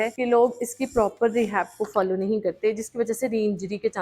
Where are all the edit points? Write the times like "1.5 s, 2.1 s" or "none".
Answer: 2.6 s